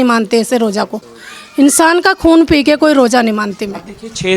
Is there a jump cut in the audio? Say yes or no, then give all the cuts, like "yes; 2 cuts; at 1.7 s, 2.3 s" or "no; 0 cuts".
no; 0 cuts